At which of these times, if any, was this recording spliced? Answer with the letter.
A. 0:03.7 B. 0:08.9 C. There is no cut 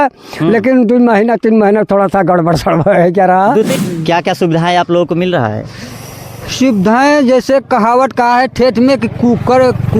A